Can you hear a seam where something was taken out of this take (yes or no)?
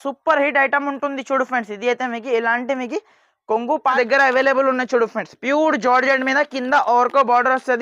yes